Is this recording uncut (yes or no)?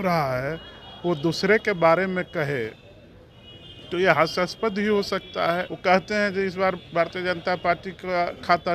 no